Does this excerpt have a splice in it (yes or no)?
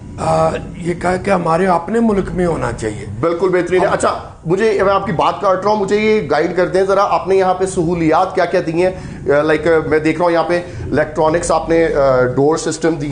no